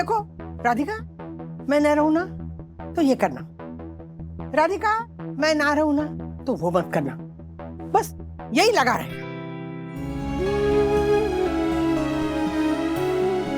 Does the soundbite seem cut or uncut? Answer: cut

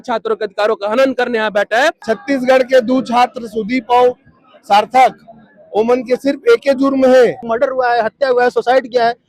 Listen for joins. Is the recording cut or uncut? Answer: cut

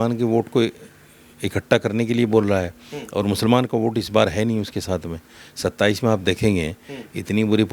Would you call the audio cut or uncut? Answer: uncut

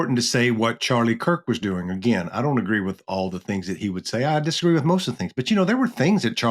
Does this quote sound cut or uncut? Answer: uncut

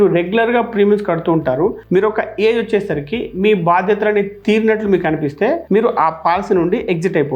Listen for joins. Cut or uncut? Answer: uncut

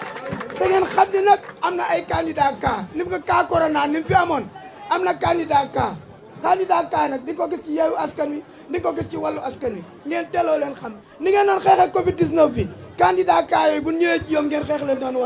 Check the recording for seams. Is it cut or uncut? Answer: uncut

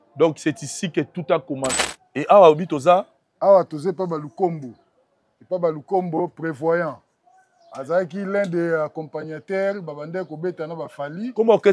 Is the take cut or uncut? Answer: cut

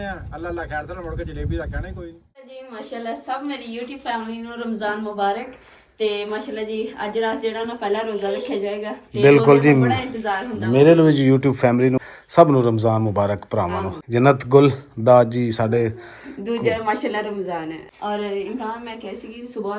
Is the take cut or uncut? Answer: cut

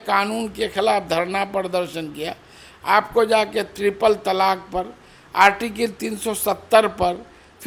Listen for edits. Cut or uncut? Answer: uncut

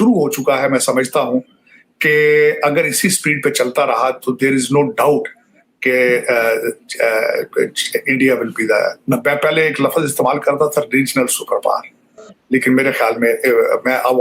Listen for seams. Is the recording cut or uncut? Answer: uncut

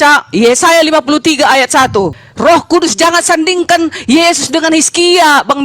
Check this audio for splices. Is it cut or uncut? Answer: cut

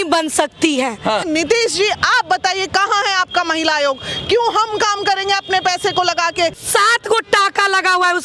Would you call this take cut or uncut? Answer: cut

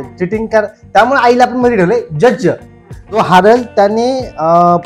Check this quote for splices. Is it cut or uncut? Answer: cut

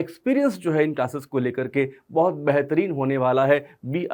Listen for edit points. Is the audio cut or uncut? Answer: uncut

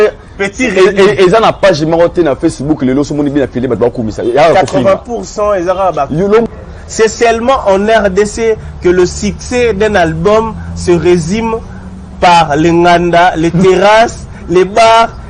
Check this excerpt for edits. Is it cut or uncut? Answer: cut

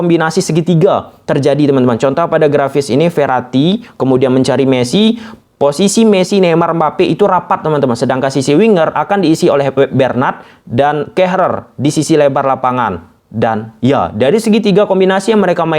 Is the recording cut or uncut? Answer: uncut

